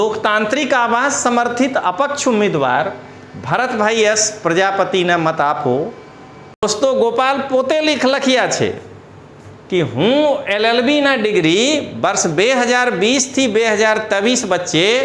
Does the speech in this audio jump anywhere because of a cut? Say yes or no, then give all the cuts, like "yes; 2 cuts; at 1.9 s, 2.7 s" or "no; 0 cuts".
yes; 1 cut; at 6.6 s